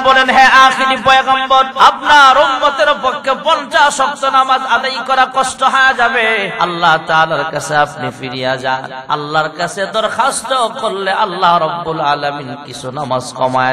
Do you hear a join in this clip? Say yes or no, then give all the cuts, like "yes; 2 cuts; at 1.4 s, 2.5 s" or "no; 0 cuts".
yes; 3 cuts; at 1.7 s, 6.5 s, 8.9 s